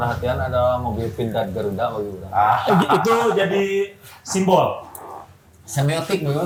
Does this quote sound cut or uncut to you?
uncut